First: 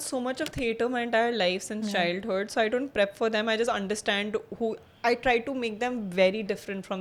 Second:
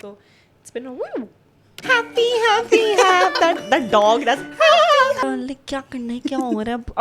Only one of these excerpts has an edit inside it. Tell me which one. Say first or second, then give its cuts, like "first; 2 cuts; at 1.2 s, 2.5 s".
second; 2 cuts; at 1.8 s, 5.2 s